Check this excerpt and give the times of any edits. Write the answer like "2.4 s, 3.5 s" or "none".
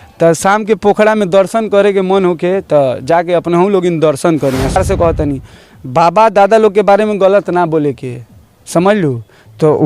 4.8 s